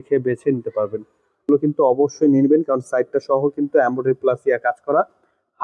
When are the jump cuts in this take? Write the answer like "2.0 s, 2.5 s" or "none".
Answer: 1.5 s